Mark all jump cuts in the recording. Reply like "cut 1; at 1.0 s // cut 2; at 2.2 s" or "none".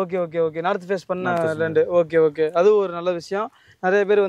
none